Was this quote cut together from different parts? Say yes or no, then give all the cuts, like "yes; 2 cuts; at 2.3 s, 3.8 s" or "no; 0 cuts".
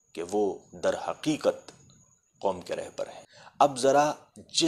yes; 1 cut; at 3.2 s